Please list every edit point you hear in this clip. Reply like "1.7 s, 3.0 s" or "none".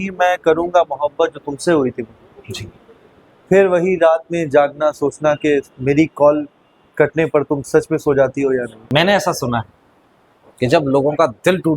8.8 s